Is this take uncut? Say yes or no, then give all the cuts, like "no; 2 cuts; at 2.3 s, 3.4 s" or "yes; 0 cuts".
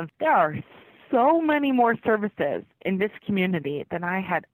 yes; 0 cuts